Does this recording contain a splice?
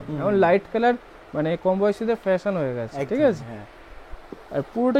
no; 0 cuts

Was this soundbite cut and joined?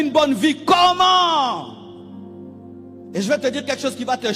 no; 0 cuts

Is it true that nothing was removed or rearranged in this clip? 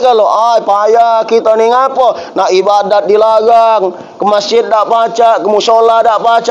yes; 0 cuts

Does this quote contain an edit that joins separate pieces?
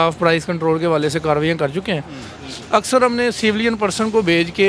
yes; 1 cut; at 2.3 s

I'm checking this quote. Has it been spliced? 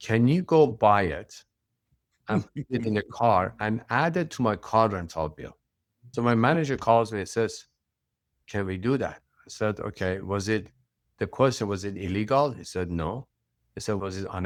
no; 0 cuts

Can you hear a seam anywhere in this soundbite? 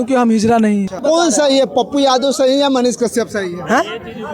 yes; 1 cut; at 1.0 s

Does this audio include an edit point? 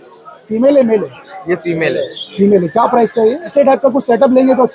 yes; 1 cut; at 3.5 s

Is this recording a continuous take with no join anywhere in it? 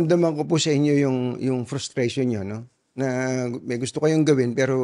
yes; 0 cuts

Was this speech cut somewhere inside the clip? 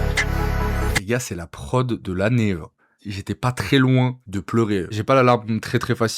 yes; 2 cuts; at 0.9 s, 4.9 s

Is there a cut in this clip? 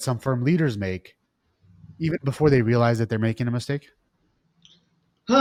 no; 0 cuts

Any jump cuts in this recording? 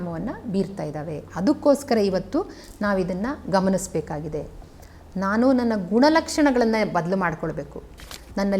no; 0 cuts

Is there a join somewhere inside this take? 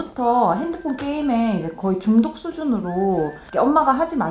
no; 0 cuts

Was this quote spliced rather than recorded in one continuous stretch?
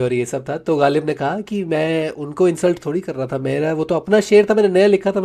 no; 0 cuts

